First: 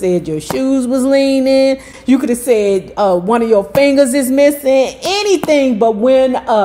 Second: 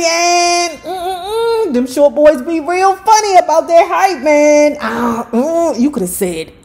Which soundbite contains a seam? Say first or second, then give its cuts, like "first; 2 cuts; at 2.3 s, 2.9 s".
first; 1 cut; at 1.9 s